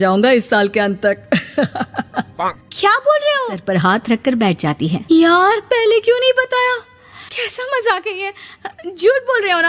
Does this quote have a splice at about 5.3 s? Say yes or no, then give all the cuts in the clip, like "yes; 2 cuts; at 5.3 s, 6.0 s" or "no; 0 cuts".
no; 1 cut; at 3.6 s